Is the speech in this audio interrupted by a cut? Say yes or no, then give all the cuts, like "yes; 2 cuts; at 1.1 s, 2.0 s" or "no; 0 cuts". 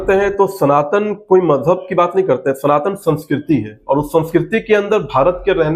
no; 0 cuts